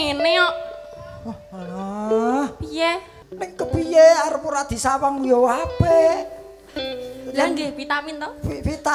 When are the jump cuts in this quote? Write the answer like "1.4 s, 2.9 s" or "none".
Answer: 3.1 s

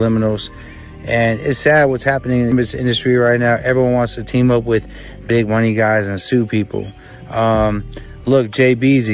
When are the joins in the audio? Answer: none

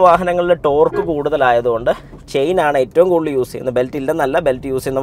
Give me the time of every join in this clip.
none

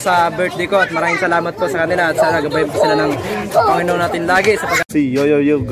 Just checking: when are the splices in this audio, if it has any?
4.8 s

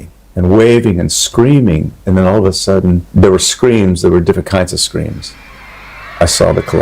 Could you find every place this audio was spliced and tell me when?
2.0 s

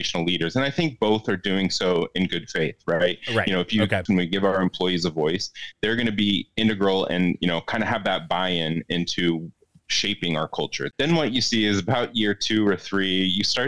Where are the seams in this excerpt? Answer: 4.0 s, 10.8 s

